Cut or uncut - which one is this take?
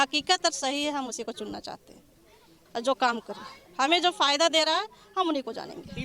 uncut